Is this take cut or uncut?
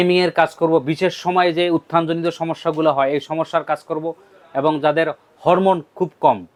uncut